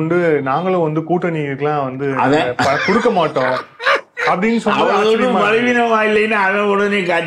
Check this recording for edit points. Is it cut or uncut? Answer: uncut